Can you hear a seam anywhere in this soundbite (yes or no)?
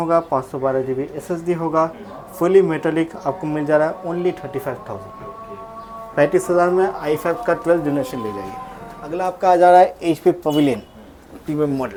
no